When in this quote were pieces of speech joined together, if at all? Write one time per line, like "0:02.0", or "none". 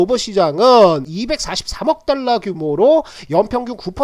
0:01.1